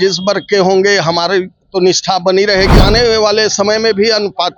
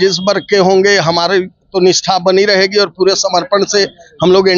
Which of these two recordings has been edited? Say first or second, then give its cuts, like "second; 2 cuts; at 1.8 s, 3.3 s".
first; 1 cut; at 2.8 s